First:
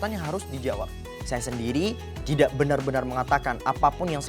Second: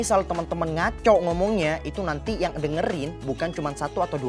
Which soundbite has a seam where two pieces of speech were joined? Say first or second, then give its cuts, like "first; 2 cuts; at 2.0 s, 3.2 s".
first; 1 cut; at 1.1 s